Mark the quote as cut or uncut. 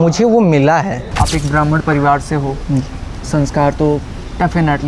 cut